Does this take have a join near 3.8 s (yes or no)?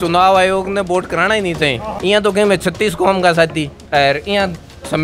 yes